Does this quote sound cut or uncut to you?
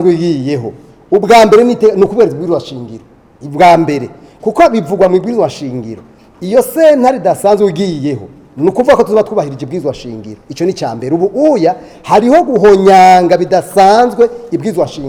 uncut